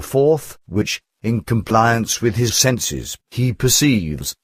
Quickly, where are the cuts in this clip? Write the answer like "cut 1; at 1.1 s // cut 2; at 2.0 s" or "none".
cut 1; at 2.0 s